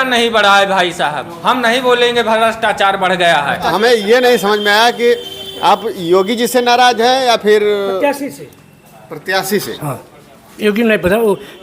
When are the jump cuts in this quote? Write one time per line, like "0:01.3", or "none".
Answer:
0:03.7